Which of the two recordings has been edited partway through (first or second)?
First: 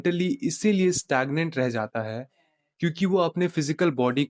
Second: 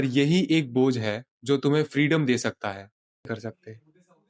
second